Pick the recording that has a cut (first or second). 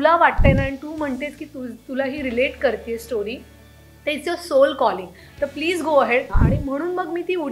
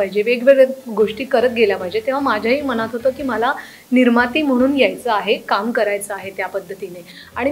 first